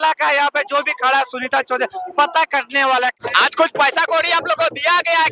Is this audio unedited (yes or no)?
no